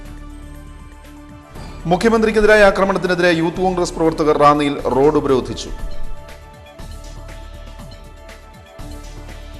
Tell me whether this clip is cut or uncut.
uncut